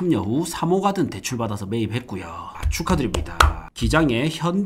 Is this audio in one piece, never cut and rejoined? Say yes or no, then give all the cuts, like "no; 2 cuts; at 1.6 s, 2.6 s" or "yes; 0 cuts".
yes; 0 cuts